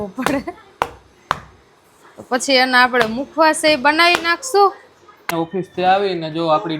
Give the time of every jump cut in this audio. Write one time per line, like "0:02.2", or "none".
0:05.3

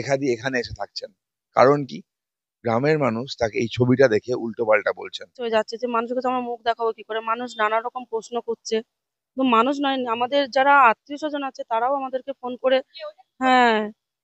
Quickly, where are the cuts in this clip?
0:05.4

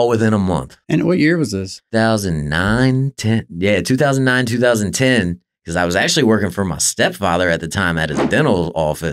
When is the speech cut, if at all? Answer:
0:01.8

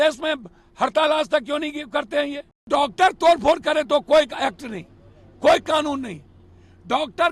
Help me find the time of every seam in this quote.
0:02.7

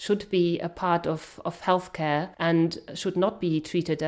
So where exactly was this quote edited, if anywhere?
0:02.3

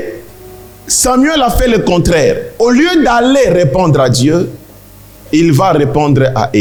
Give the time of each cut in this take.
none

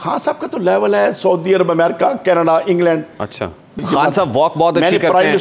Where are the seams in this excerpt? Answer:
0:03.8

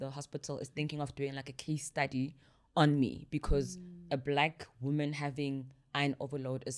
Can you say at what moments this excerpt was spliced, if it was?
none

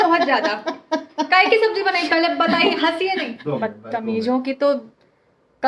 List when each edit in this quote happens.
0:03.3

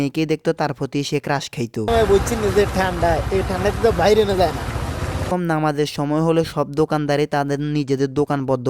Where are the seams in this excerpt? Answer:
0:01.9
0:05.3

